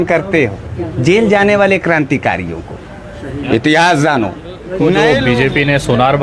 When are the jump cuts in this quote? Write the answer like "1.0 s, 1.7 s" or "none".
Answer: 5.0 s